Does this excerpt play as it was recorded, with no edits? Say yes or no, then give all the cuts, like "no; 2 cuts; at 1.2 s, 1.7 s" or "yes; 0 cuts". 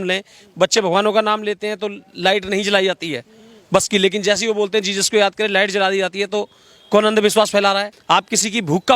no; 1 cut; at 7.9 s